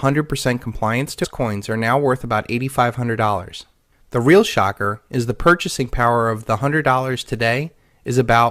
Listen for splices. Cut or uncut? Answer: uncut